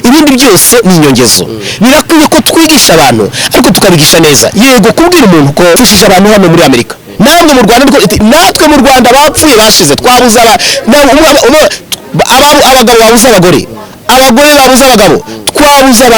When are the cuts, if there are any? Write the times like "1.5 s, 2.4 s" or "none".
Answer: 5.8 s